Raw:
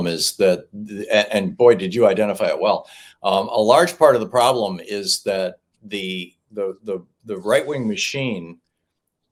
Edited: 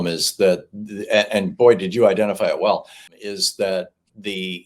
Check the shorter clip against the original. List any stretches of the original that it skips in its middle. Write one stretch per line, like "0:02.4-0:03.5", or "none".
0:03.1-0:04.8